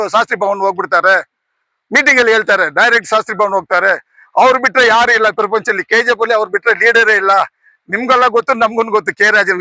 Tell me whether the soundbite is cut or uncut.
uncut